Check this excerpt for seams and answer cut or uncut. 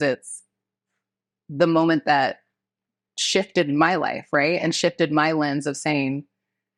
uncut